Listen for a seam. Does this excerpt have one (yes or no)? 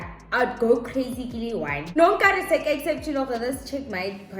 yes